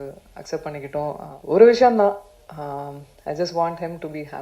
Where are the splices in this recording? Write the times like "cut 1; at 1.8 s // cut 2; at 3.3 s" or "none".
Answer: cut 1; at 1.3 s

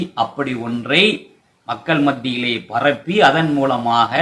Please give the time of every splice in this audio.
none

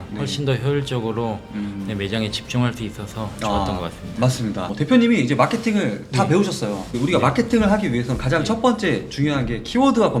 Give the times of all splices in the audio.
none

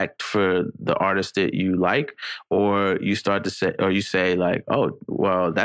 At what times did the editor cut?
none

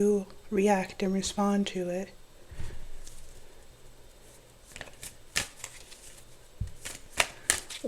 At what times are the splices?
none

